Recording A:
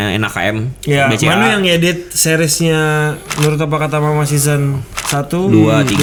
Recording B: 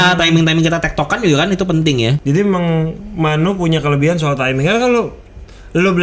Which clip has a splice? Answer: B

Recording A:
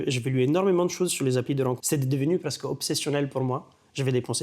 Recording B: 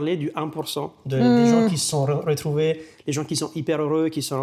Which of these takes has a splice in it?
A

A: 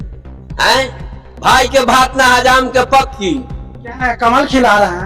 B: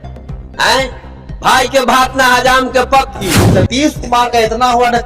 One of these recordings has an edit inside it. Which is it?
B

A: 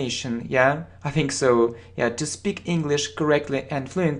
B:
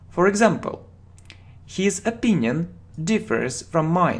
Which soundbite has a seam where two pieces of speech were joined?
B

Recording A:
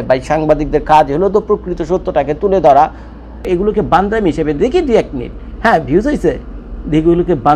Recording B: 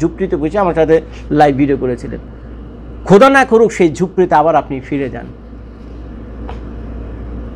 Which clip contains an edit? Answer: A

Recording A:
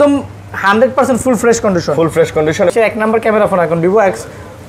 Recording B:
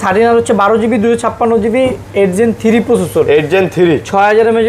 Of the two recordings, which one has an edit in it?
A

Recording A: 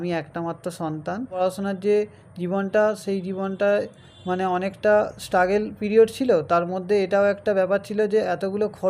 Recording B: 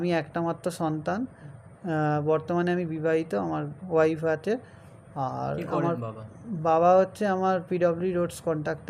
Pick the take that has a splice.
A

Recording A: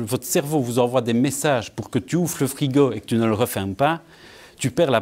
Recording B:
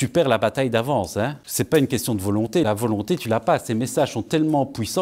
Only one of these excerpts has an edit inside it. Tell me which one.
B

